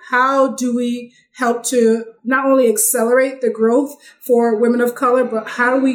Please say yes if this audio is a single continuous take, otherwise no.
yes